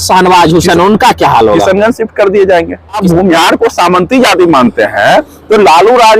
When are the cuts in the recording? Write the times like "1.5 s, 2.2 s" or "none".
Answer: 3.0 s